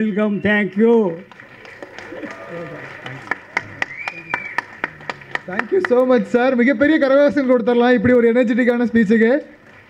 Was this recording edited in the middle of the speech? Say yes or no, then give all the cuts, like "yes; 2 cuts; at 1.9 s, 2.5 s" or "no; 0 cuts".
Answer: no; 0 cuts